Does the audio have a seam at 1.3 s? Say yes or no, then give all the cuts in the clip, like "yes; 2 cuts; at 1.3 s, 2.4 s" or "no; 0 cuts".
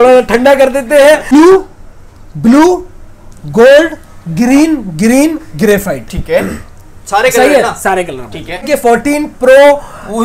yes; 2 cuts; at 1.3 s, 8.7 s